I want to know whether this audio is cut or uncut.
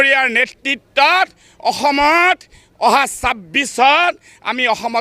uncut